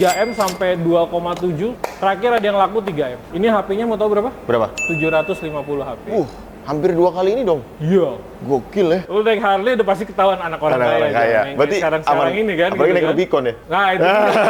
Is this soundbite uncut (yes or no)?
no